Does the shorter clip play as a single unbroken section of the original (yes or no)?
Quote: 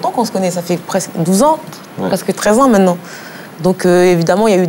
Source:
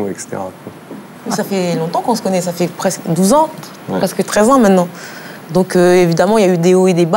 yes